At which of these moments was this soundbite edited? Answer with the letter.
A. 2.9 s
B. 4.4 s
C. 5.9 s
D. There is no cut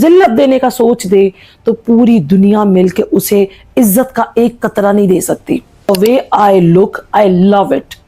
C